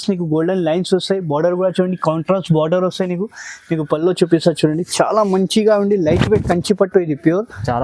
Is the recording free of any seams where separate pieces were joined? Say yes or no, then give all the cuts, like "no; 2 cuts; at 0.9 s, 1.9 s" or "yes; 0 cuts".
yes; 0 cuts